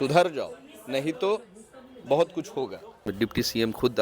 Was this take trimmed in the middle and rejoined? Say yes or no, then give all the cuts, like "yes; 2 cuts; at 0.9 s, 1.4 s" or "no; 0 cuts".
yes; 1 cut; at 3.0 s